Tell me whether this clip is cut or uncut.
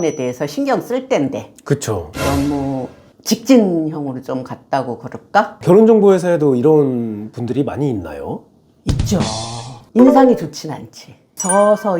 cut